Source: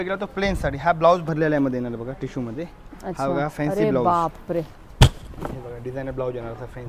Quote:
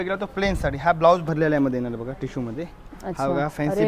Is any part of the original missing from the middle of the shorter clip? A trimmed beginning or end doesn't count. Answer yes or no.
no